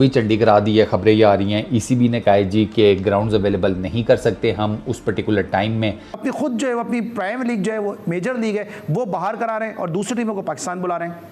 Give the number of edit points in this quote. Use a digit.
1